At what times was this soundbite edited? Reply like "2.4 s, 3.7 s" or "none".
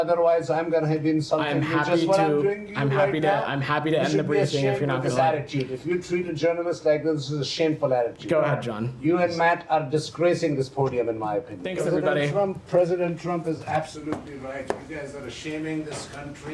11.6 s